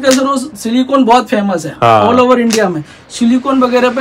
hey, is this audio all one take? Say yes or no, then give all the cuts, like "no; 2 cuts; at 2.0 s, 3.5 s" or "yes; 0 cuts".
yes; 0 cuts